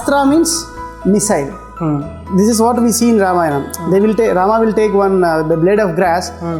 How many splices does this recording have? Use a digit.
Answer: 0